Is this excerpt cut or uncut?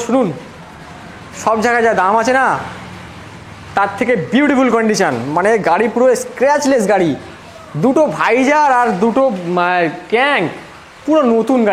uncut